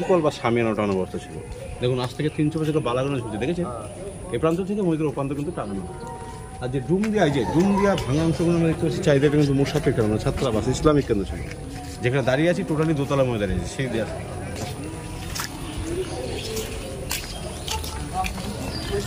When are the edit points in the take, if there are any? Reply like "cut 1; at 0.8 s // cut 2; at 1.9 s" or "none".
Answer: none